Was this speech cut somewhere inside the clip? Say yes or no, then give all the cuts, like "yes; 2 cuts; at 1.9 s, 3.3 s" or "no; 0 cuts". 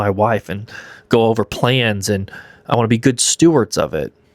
no; 0 cuts